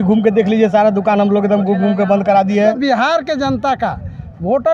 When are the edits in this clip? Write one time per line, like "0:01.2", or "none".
0:02.8